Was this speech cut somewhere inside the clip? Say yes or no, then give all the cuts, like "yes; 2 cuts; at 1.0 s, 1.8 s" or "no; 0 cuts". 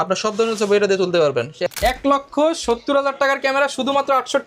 yes; 1 cut; at 1.6 s